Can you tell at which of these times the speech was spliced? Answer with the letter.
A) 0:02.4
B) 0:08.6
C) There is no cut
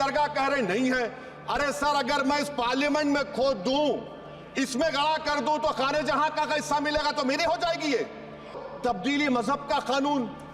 B